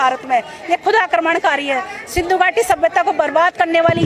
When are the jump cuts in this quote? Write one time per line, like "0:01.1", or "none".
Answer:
none

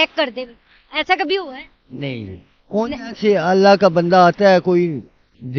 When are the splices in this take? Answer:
none

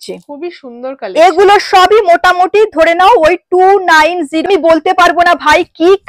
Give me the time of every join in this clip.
0:04.4

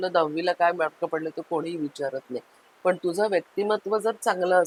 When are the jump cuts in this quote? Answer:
none

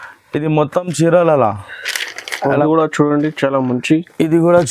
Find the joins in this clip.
0:02.6

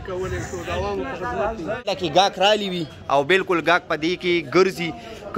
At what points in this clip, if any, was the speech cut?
0:01.8

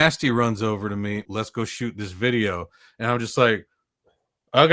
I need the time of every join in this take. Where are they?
0:01.2

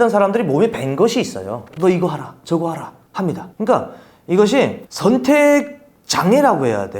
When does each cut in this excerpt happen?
0:01.7

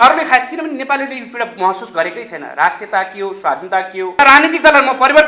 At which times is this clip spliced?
0:04.1

